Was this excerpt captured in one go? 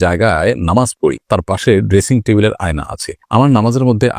yes; 0 cuts

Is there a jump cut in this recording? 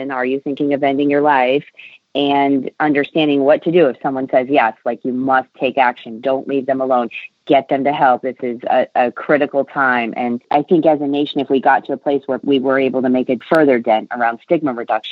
yes; 3 cuts; at 10.4 s, 12.4 s, 13.4 s

